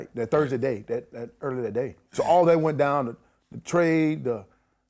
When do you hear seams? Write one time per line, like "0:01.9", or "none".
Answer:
0:02.0